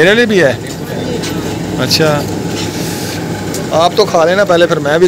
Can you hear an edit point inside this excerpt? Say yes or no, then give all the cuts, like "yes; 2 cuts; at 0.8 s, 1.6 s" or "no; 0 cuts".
no; 0 cuts